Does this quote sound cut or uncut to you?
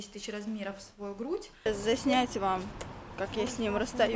cut